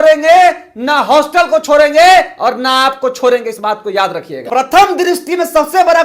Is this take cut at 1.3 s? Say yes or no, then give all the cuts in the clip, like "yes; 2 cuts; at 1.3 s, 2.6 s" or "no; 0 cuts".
no; 1 cut; at 4.3 s